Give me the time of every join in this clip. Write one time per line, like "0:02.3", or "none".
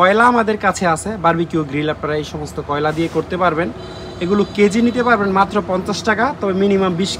none